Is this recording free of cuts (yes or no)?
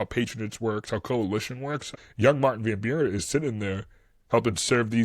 no